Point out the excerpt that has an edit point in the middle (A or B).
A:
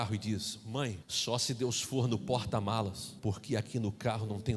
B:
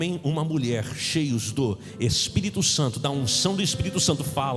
A